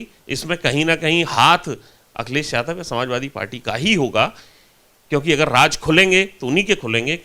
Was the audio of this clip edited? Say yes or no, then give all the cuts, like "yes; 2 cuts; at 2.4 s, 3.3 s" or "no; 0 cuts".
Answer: no; 0 cuts